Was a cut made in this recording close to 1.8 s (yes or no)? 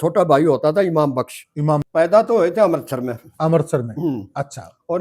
yes